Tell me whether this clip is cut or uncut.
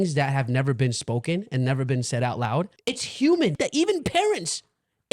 cut